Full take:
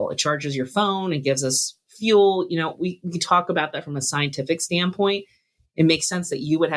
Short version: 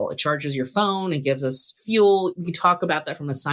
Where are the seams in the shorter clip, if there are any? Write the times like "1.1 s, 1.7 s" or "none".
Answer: 1.7 s, 2.3 s